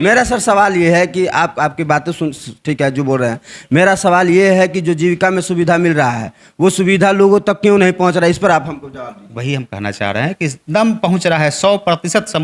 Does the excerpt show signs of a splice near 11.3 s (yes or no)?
no